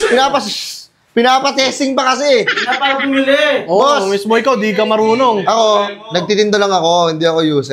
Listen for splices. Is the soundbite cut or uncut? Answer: uncut